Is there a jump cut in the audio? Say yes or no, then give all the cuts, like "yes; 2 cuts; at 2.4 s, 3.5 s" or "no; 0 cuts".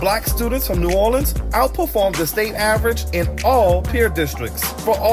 no; 0 cuts